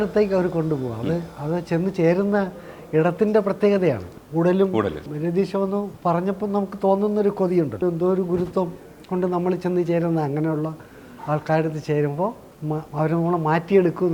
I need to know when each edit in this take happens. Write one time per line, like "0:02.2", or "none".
0:04.1
0:05.1
0:05.9
0:07.8
0:12.5